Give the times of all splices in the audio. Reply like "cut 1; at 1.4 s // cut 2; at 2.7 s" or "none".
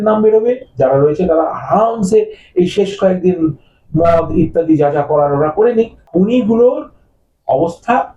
cut 1; at 6.0 s